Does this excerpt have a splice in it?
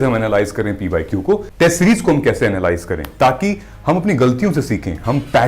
yes; 1 cut; at 1.5 s

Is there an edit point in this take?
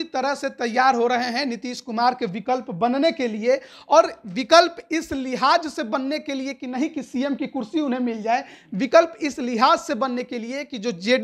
no; 0 cuts

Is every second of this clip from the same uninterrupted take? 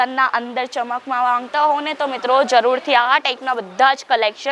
yes; 0 cuts

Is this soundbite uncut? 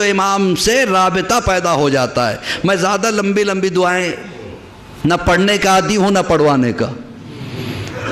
yes; 0 cuts

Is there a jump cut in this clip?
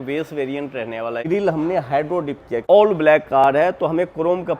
yes; 2 cuts; at 1.2 s, 2.6 s

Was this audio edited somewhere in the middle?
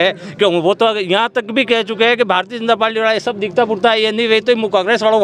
no; 0 cuts

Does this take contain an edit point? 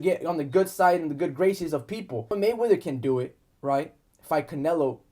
yes; 1 cut; at 2.3 s

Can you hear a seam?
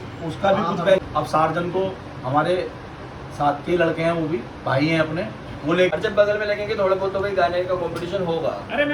yes; 2 cuts; at 1.0 s, 5.9 s

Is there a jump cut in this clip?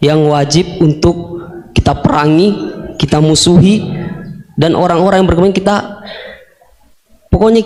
no; 0 cuts

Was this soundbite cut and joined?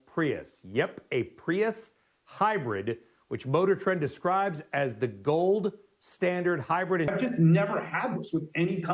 yes; 1 cut; at 7.1 s

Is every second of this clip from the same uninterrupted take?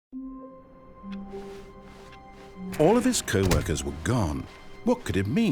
no; 1 cut; at 2.8 s

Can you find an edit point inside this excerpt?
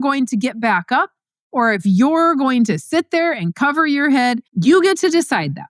yes; 1 cut; at 4.5 s

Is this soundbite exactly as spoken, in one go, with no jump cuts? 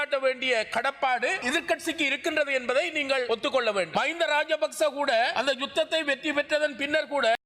no; 3 cuts; at 1.4 s, 3.9 s, 5.3 s

